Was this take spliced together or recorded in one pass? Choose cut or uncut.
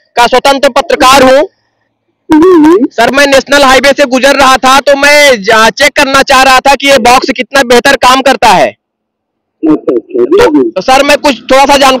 uncut